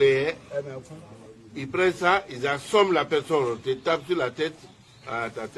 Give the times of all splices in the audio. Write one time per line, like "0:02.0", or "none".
none